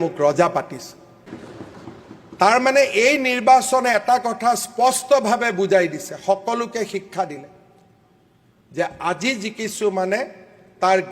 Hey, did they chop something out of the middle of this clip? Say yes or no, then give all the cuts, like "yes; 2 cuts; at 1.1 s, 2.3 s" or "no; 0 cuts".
yes; 1 cut; at 1.2 s